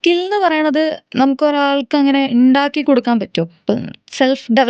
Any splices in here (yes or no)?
no